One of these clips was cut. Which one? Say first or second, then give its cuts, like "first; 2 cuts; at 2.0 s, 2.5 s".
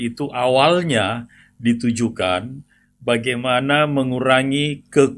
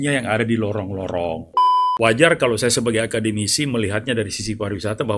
second; 1 cut; at 1.8 s